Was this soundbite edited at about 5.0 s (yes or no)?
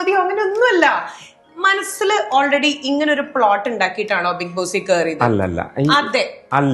no